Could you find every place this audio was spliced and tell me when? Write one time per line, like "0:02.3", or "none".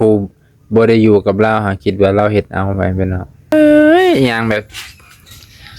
0:03.5